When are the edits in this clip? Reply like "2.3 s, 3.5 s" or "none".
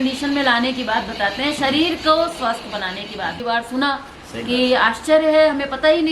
3.4 s